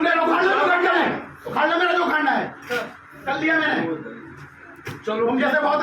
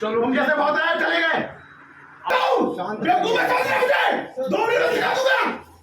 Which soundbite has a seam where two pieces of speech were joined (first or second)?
second